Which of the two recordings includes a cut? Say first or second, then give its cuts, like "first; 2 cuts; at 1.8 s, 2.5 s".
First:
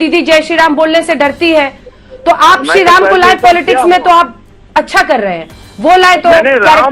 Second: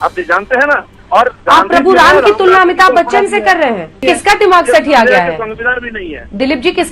second; 2 cuts; at 0.9 s, 4.0 s